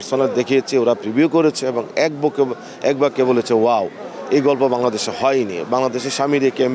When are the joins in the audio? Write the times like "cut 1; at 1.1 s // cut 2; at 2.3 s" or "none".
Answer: none